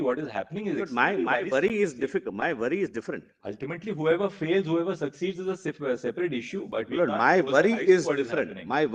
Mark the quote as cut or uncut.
uncut